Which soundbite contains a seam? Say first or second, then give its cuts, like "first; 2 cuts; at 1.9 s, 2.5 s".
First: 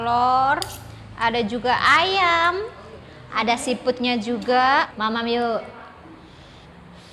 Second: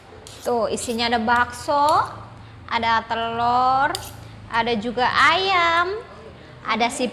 first; 1 cut; at 4.9 s